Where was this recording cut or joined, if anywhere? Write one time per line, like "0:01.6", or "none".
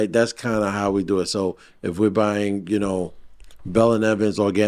none